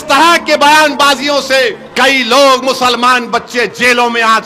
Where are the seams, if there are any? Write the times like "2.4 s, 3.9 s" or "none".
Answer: 1.8 s